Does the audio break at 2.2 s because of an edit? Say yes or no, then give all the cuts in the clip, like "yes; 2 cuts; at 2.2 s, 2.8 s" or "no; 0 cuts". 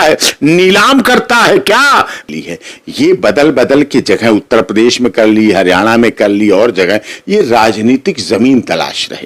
yes; 1 cut; at 2.2 s